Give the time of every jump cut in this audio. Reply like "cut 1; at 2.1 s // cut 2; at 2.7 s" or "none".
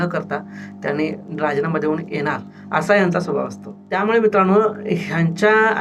cut 1; at 2.5 s // cut 2; at 4.0 s